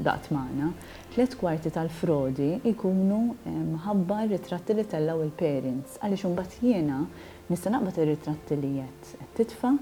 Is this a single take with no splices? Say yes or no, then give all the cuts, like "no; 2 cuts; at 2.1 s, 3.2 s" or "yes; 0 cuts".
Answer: yes; 0 cuts